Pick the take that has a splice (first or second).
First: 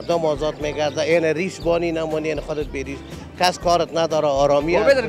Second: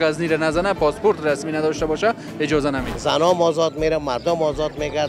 second